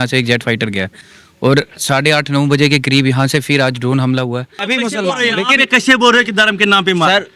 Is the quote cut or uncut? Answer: cut